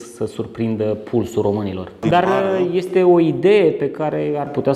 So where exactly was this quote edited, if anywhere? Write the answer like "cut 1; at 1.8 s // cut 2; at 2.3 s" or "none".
cut 1; at 2.0 s

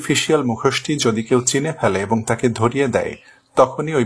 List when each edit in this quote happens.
none

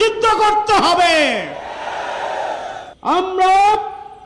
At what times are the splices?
cut 1; at 3.0 s

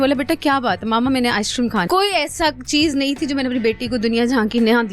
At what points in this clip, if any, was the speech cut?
cut 1; at 1.9 s

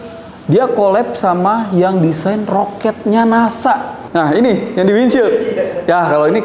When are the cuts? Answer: cut 1; at 4.0 s

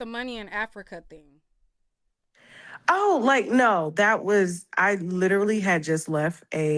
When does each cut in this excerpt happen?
none

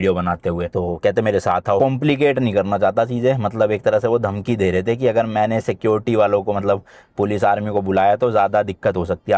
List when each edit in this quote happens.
cut 1; at 1.8 s

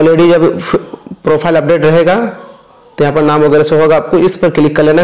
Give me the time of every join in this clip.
none

